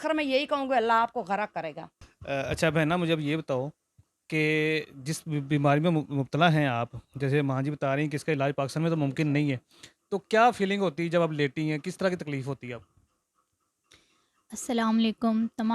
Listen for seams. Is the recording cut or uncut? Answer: uncut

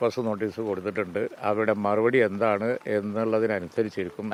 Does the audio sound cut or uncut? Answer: uncut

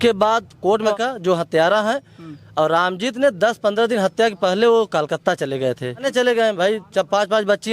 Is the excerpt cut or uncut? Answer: cut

